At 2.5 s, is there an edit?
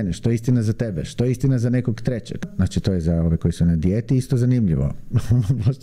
yes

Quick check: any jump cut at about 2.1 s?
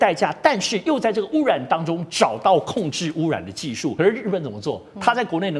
no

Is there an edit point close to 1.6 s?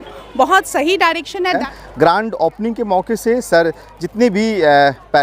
yes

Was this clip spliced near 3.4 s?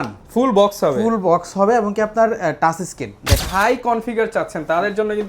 yes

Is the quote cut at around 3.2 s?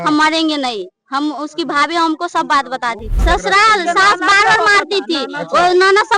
yes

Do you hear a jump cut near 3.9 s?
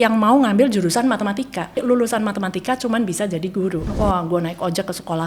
yes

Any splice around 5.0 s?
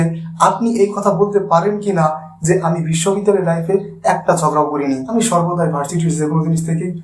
yes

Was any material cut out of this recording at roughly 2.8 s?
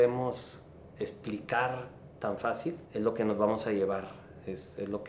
yes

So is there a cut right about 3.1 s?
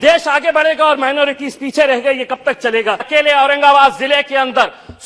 yes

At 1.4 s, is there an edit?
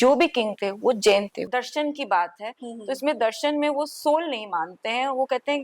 yes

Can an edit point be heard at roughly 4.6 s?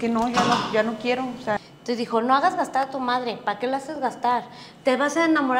no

